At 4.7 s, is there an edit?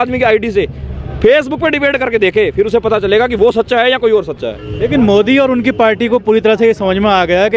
no; 0 cuts

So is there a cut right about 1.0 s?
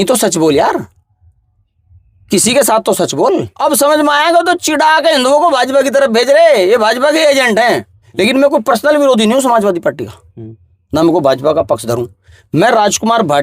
no; 2 cuts; at 3.5 s, 8.0 s

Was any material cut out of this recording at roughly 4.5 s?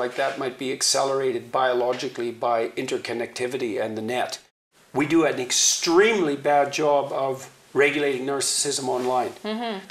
yes; 1 cut; at 4.5 s

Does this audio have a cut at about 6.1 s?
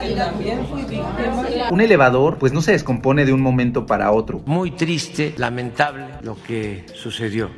no; 2 cuts; at 1.7 s, 4.4 s

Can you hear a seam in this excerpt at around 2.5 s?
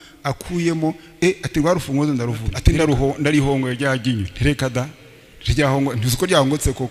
yes; 1 cut; at 2.5 s

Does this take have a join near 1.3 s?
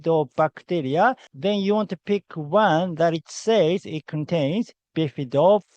yes; 1 cut; at 1.3 s

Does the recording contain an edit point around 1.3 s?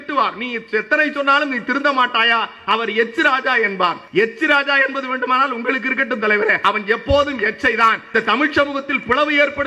no; 3 cuts; at 4.0 s, 6.6 s, 8.1 s

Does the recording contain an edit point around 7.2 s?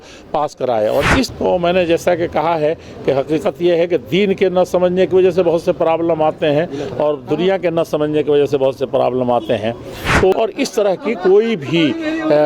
no; 2 cuts; at 1.3 s, 10.3 s

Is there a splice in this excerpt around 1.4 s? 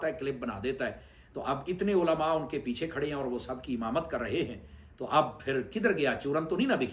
no; 0 cuts

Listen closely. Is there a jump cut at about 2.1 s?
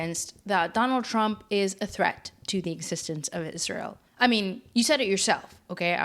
no; 1 cut; at 4.0 s

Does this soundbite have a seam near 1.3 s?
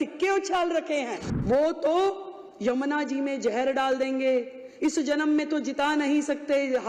yes; 1 cut; at 1.3 s

